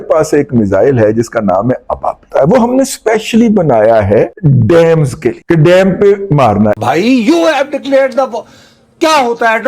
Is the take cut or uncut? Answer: cut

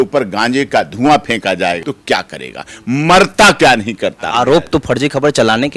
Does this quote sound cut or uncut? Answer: cut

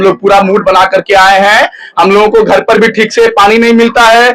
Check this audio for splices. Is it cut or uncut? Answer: uncut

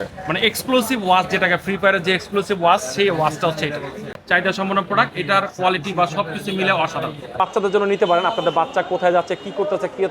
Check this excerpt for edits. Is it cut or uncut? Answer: cut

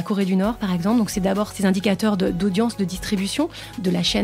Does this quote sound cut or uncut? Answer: cut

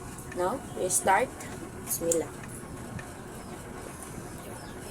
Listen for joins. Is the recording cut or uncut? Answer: cut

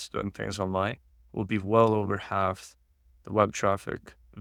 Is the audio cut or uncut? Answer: uncut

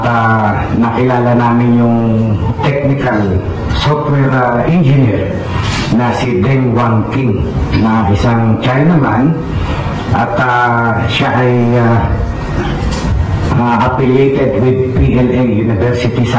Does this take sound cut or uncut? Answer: uncut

